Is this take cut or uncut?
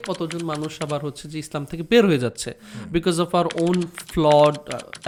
uncut